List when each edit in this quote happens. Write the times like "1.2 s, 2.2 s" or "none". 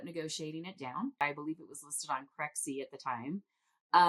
1.2 s